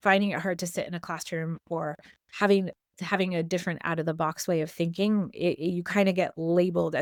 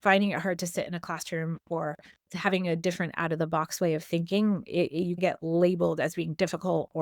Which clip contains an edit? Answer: second; 2 cuts; at 2.2 s, 5.2 s

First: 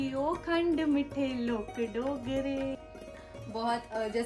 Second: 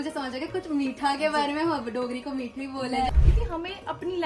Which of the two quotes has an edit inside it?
second; 1 cut; at 3.3 s

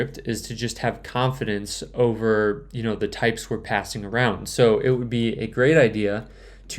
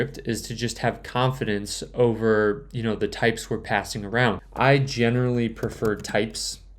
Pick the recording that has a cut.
second; 1 cut; at 4.4 s

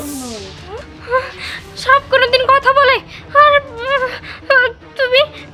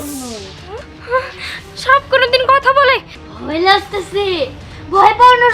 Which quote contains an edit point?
second; 1 cut; at 3.1 s

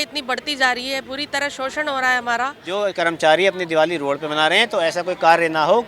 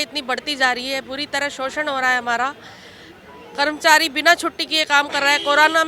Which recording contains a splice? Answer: first; 1 cut; at 2.6 s

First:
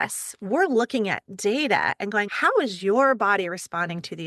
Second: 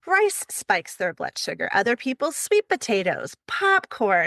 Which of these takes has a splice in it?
first; 1 cut; at 2.3 s

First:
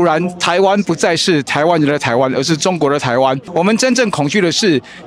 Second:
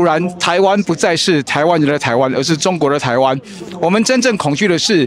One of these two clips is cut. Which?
first; 1 cut; at 3.4 s

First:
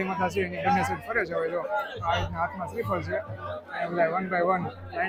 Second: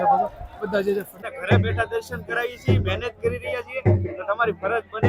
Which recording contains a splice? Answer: second; 1 cut; at 1.2 s

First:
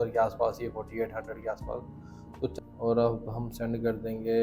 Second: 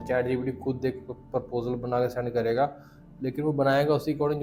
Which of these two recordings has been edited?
first; 1 cut; at 2.5 s

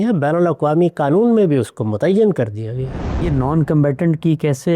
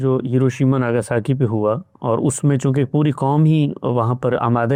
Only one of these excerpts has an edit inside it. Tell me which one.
first; 1 cut; at 3.3 s

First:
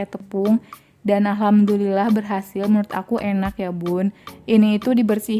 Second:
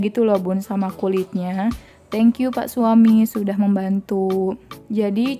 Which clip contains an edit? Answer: first; 1 cut; at 4.3 s

